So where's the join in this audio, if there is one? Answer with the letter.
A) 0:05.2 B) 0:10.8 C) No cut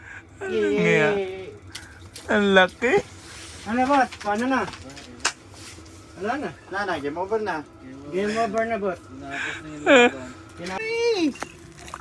B